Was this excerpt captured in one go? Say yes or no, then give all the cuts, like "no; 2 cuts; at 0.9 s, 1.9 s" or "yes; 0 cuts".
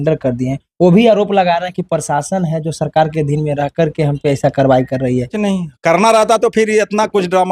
no; 1 cut; at 5.3 s